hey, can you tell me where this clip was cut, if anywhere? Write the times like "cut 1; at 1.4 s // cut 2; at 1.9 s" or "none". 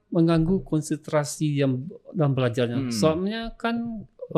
none